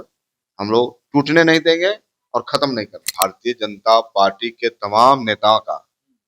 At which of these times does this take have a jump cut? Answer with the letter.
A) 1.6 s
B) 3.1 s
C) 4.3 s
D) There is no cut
B